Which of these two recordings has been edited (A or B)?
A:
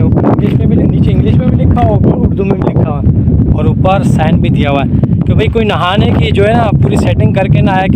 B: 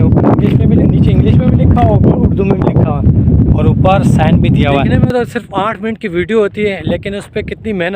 B